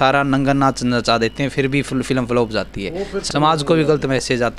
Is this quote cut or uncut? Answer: cut